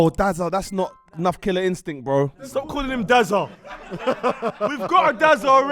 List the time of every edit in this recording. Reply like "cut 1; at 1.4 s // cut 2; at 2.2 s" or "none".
cut 1; at 2.3 s